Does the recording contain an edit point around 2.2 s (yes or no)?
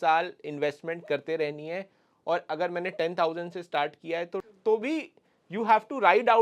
no